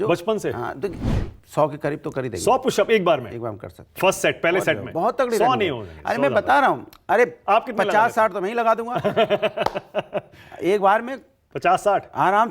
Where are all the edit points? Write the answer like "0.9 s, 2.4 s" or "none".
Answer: 1.0 s